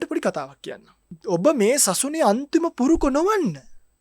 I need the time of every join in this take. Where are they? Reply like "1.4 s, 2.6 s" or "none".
1.1 s